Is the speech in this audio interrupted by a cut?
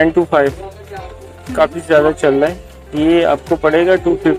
no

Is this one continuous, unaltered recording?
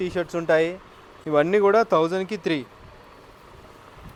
yes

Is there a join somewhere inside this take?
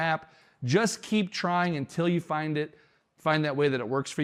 no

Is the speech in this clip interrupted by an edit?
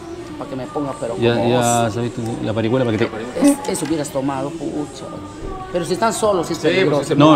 no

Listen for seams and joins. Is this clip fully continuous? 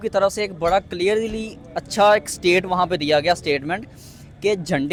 yes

